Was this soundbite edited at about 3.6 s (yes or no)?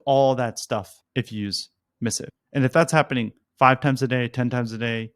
no